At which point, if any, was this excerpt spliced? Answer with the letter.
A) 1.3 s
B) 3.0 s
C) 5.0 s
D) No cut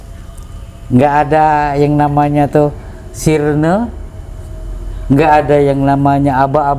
D